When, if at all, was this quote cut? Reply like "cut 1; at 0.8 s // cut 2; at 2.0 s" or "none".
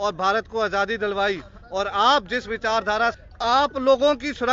cut 1; at 3.2 s